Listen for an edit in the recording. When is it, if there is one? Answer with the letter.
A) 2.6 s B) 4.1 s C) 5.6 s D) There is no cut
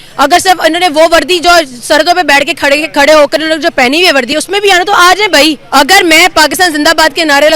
C